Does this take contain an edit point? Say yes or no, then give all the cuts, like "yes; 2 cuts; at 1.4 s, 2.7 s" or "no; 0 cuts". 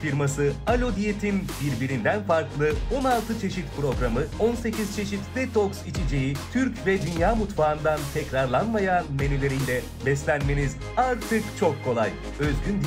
no; 0 cuts